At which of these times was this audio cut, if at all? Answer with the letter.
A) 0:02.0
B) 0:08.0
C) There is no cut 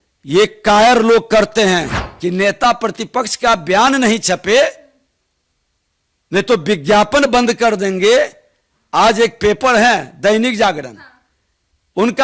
A